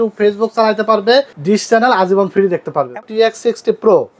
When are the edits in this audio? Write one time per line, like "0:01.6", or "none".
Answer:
0:01.3
0:02.9